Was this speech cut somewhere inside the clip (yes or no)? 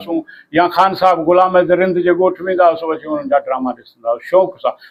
no